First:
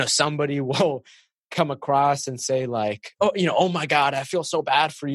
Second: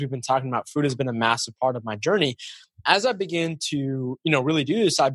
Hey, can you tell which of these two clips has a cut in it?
first; 1 cut; at 3.1 s

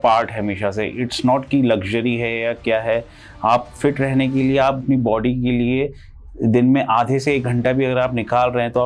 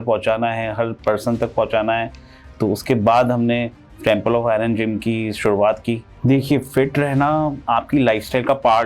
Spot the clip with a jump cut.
second; 1 cut; at 6.1 s

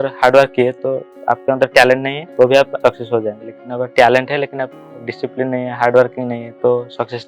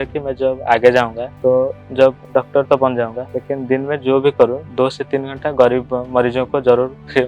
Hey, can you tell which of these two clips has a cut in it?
first; 3 cuts; at 1.1 s, 2.2 s, 2.7 s

